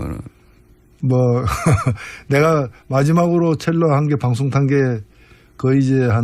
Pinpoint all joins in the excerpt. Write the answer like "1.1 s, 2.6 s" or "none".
3.4 s